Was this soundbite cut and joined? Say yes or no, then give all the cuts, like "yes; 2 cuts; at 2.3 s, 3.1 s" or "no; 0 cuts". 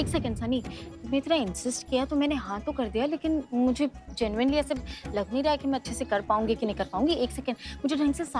no; 0 cuts